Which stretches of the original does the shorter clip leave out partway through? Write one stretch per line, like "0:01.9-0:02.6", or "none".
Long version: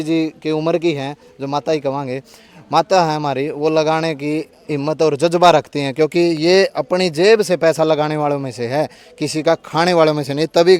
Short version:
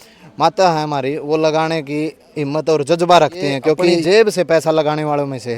0:06.3-0:07.1